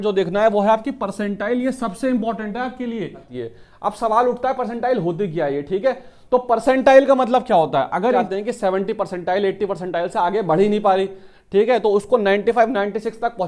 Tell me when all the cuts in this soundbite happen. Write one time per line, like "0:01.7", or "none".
0:03.3
0:08.2